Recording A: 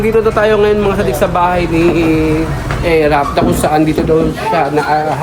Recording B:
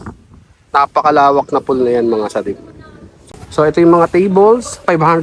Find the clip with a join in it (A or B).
B